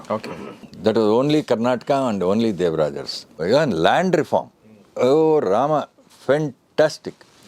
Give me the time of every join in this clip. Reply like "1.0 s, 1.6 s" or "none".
3.4 s